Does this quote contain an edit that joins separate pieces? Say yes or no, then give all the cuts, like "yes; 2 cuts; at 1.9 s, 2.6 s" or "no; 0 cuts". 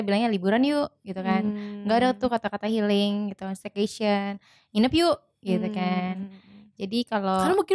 no; 0 cuts